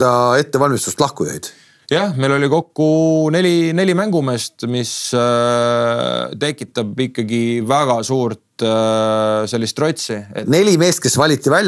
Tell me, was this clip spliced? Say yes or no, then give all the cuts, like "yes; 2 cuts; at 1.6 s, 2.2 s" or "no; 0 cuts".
no; 0 cuts